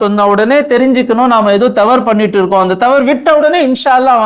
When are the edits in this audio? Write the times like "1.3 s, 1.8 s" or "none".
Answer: none